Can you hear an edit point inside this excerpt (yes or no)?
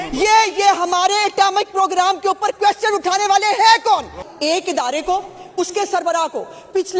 yes